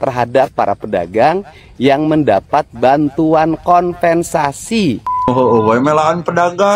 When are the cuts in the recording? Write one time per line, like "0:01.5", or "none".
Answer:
0:05.3